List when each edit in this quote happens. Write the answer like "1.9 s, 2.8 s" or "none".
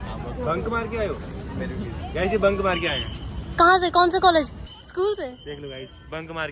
none